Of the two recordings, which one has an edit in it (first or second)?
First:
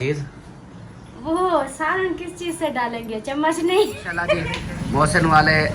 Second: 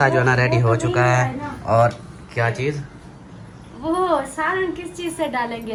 first